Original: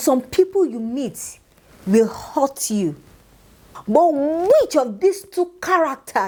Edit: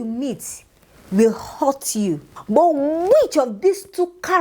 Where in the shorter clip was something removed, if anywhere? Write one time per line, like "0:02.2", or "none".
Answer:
0:02.3

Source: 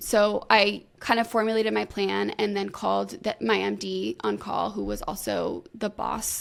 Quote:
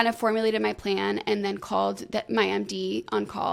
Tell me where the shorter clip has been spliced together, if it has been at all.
none

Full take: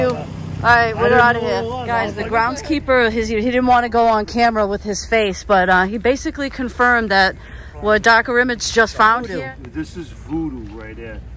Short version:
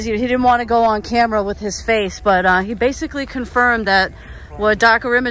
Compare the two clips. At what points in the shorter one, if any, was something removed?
none

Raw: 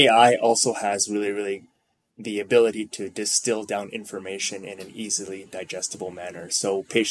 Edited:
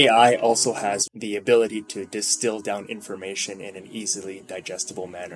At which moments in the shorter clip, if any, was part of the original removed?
0:01.0

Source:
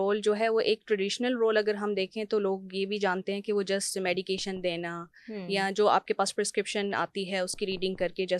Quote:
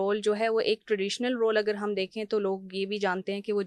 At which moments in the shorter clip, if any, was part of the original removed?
none

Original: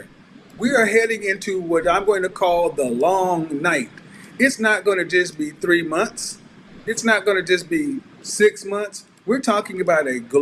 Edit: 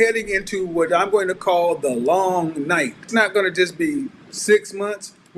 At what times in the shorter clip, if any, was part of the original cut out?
0:03.0

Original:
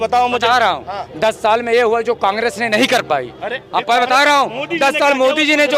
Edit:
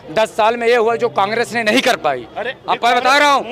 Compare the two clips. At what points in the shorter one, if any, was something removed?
none

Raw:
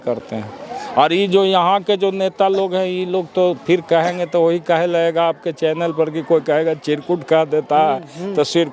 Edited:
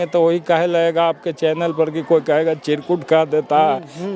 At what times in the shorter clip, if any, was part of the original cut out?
none

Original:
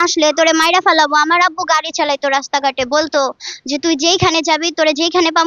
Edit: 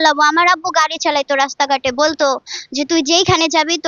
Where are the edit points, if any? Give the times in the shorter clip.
none

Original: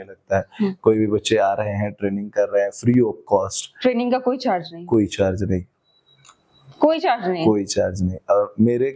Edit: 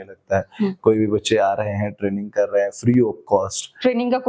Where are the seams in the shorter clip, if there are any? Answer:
none

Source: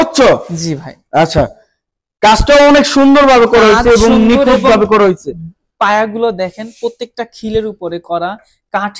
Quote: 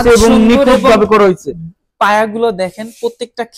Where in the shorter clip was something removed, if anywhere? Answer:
none

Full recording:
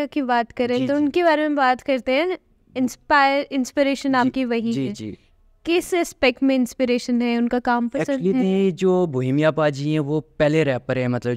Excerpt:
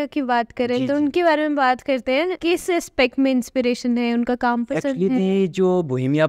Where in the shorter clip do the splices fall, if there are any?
0:02.4

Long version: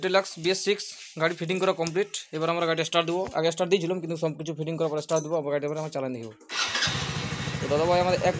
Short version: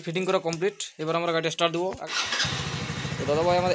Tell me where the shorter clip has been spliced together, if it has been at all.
0:02.0

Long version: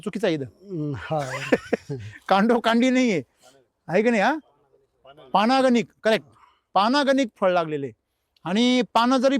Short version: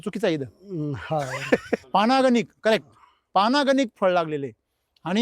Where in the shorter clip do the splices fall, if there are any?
0:01.8

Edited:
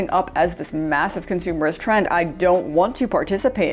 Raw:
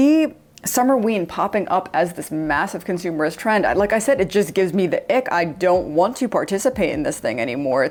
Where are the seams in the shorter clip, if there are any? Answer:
0:02.1

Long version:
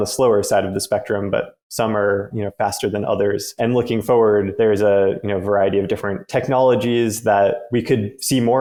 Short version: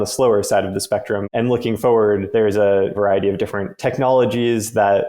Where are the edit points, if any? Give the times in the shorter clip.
0:01.2
0:02.9

